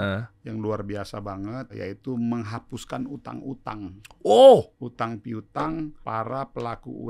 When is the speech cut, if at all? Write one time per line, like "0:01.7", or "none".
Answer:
0:01.7
0:04.8
0:06.0